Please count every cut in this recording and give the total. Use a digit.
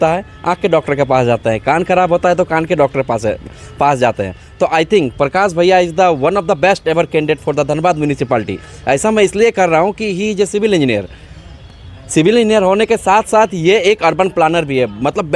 0